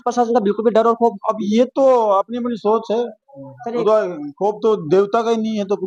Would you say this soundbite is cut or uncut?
uncut